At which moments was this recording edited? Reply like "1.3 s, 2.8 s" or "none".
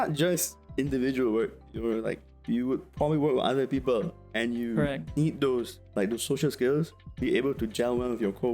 none